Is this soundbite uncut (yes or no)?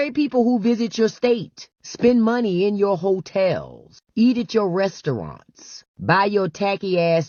yes